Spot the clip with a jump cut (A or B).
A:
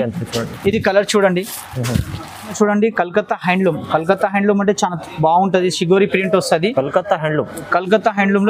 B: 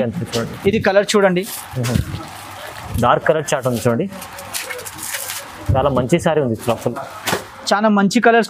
A